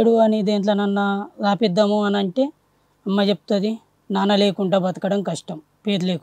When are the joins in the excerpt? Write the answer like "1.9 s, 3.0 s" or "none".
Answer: none